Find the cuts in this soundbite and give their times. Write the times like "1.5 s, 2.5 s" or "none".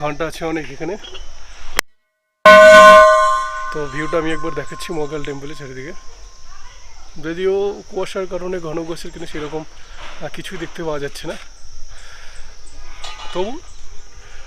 none